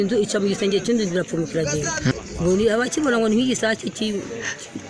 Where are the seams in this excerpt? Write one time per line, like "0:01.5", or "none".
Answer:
0:02.1